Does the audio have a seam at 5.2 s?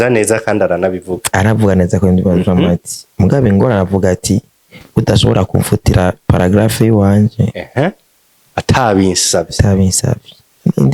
no; 0 cuts

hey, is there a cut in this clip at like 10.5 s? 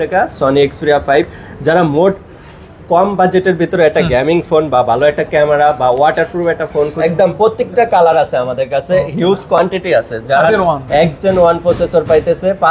yes; 2 cuts; at 6.9 s, 10.5 s

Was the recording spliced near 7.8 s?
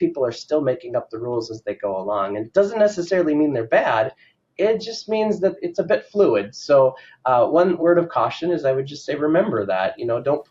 yes; 2 cuts; at 5.6 s, 7.8 s

